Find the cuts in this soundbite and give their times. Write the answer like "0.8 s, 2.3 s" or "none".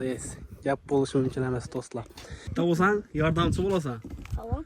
2.5 s